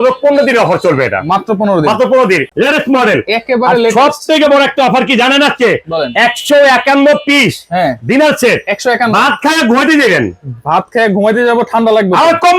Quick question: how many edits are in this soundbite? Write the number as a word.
one